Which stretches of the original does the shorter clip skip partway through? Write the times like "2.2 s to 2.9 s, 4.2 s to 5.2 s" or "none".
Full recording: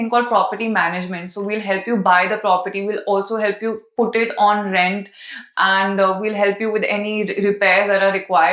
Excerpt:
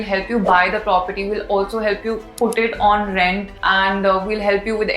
5.1 s to 5.4 s